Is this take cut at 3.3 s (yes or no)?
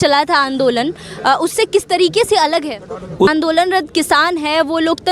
yes